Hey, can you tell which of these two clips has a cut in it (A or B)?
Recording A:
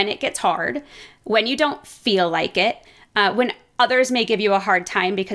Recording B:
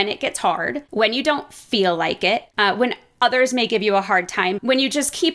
B